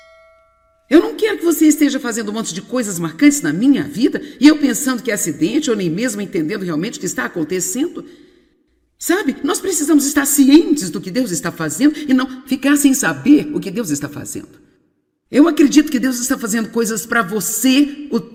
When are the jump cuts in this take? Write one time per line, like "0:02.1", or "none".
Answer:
none